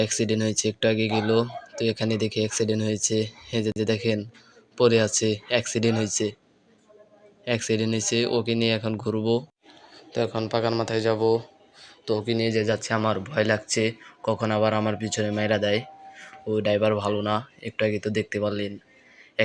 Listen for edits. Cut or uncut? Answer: uncut